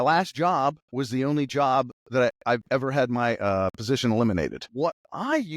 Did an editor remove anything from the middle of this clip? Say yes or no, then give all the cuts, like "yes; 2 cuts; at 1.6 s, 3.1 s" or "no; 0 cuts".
yes; 2 cuts; at 0.8 s, 4.6 s